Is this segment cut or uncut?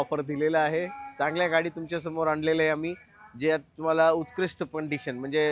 uncut